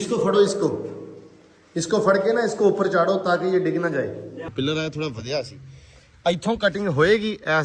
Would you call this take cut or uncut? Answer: cut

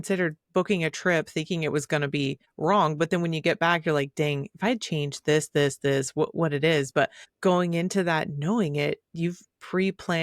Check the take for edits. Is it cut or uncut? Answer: cut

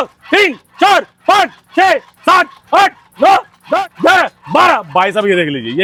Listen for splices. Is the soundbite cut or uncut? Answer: uncut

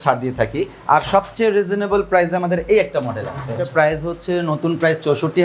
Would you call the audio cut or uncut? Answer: cut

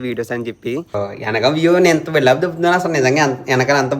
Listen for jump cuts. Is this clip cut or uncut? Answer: cut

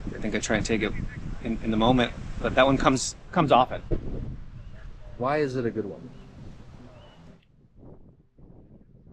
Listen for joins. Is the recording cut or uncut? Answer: cut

